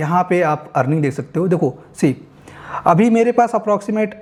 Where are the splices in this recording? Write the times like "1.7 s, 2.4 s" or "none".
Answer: none